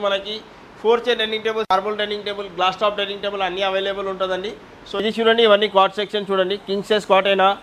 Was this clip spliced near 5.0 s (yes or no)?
yes